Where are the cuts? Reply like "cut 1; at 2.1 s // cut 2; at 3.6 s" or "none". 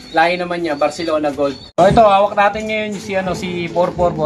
cut 1; at 1.6 s